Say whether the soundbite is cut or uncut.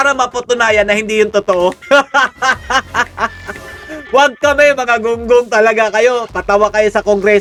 uncut